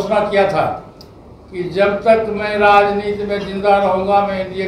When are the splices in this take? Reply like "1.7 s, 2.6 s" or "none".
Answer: none